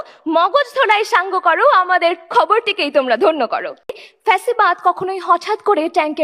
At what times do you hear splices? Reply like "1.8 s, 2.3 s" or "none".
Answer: 4.1 s